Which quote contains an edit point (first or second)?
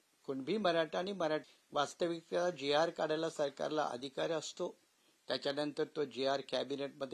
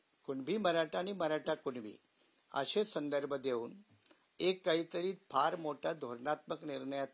first